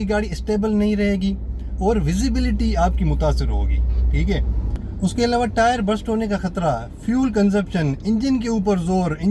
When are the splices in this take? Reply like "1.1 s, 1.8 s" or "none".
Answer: none